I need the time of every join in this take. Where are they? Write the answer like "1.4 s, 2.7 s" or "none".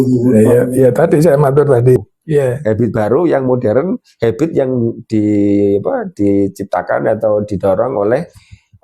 2.0 s